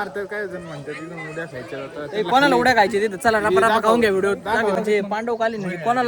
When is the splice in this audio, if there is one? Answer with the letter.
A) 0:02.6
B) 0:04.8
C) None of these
B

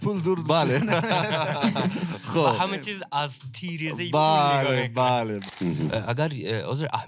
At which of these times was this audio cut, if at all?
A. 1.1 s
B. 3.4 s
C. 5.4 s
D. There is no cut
C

